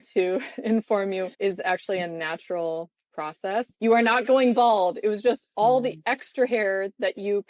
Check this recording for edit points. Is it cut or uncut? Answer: cut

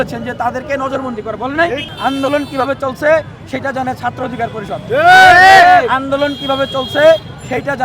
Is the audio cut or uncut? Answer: cut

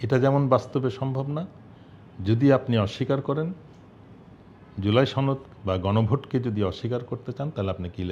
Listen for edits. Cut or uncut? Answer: uncut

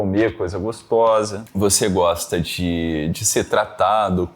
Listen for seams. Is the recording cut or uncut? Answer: cut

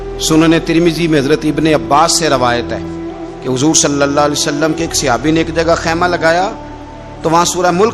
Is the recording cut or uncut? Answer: uncut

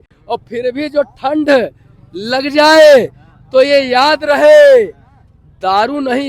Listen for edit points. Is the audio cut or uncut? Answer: uncut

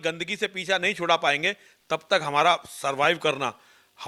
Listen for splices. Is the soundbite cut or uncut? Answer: uncut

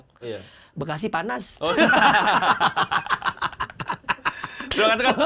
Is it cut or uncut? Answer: uncut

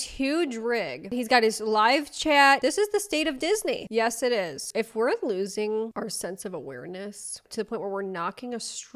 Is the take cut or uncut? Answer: cut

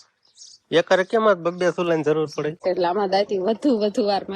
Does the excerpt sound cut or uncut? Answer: cut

